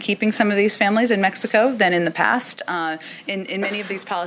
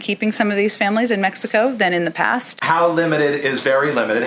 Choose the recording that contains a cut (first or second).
second